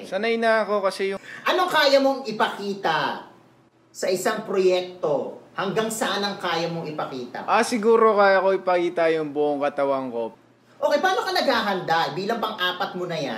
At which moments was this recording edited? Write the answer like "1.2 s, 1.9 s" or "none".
1.2 s, 10.3 s